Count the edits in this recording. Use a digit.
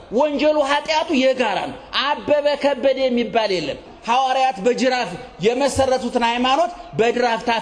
1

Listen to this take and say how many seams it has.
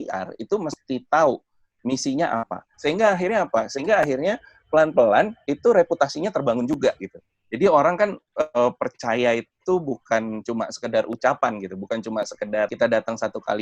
2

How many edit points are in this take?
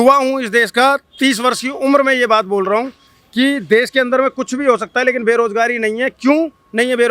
0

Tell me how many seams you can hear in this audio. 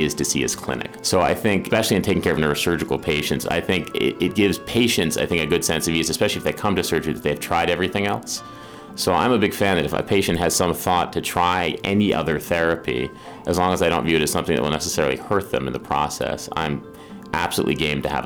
2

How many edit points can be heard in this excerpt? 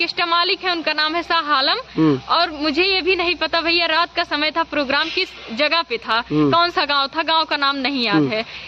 0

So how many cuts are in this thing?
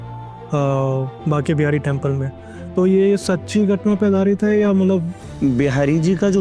1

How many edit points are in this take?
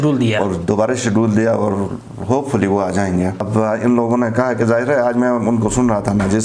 1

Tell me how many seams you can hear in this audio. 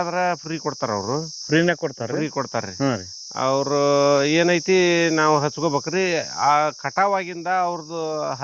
0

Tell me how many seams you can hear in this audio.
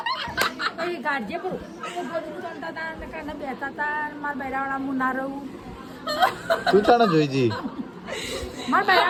0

